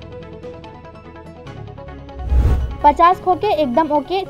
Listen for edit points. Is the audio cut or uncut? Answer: cut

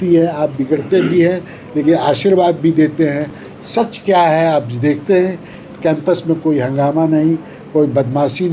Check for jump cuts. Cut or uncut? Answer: uncut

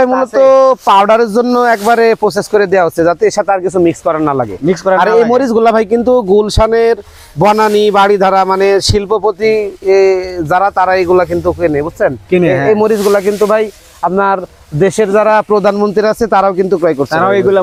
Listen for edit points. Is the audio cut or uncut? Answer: uncut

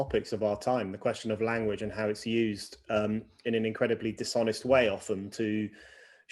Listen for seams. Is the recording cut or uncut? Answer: uncut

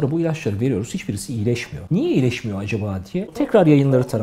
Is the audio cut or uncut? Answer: cut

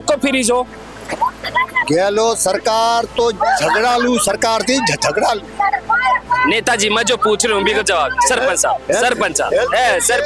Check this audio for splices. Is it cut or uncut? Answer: uncut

